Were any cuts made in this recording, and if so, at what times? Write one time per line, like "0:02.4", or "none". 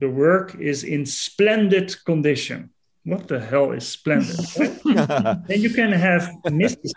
none